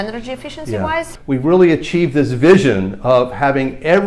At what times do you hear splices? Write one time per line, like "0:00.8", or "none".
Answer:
0:01.1